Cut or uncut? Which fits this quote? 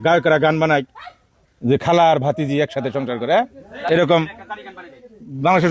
uncut